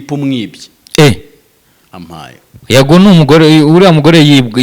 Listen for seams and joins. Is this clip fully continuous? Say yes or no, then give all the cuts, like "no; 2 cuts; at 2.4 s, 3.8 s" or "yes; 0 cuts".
yes; 0 cuts